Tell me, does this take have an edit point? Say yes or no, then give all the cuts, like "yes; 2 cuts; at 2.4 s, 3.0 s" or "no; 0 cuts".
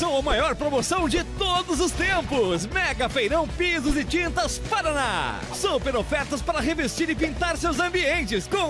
no; 0 cuts